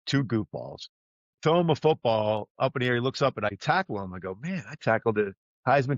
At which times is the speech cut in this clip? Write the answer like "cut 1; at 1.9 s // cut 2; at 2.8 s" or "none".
cut 1; at 3.6 s

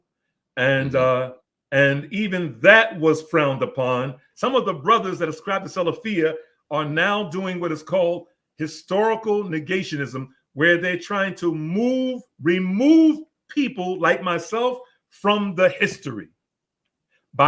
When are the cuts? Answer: cut 1; at 4.2 s

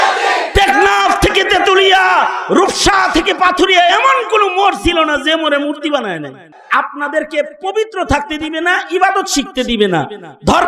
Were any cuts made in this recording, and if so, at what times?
cut 1; at 6.5 s

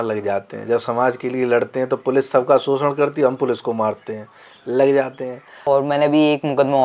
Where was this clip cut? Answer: cut 1; at 5.5 s

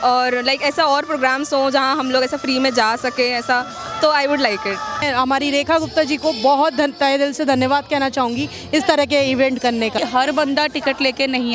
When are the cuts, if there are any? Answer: cut 1; at 5.0 s // cut 2; at 10.0 s

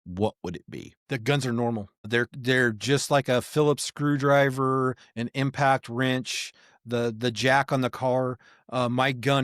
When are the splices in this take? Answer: cut 1; at 0.9 s // cut 2; at 2.1 s

